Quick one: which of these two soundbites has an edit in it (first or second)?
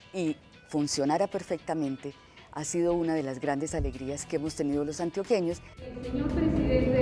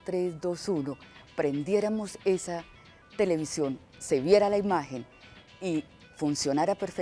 first